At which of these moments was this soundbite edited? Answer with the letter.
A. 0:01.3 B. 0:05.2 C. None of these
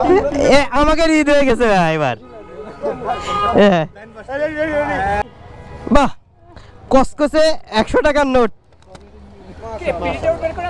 B